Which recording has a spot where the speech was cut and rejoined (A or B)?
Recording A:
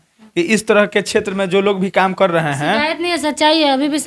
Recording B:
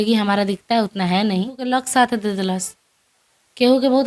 B